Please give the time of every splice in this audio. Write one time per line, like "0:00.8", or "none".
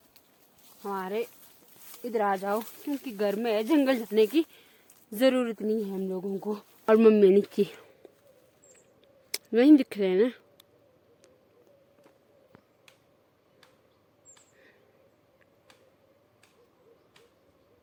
none